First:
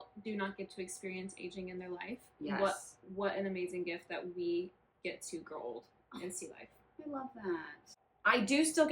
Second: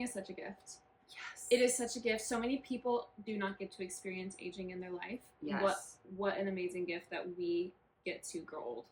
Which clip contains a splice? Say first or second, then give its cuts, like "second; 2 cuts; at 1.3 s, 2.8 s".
first; 1 cut; at 7.8 s